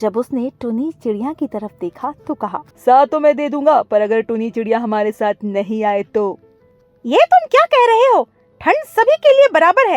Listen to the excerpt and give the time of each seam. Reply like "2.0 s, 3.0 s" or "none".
2.7 s